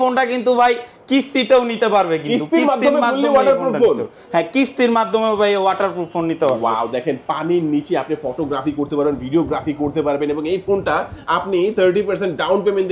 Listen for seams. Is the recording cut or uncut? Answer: uncut